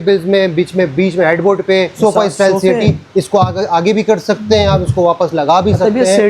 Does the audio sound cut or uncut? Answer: cut